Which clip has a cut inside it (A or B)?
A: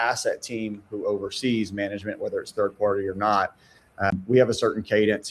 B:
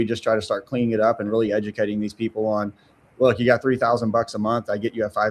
A